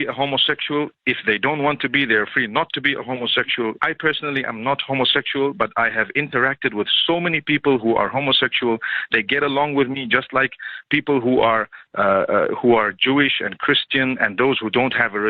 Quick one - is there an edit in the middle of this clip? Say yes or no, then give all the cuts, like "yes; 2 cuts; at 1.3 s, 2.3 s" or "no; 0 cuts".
yes; 1 cut; at 3.8 s